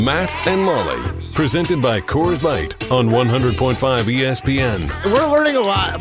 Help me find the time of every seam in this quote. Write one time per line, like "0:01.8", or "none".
0:04.9